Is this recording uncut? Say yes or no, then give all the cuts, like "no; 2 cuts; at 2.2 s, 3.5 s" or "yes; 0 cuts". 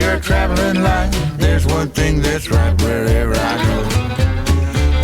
yes; 0 cuts